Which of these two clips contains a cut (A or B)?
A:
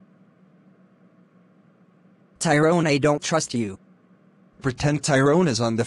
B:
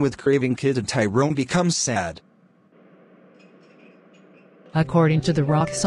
A